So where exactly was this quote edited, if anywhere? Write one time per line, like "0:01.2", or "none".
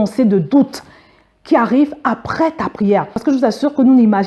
0:03.1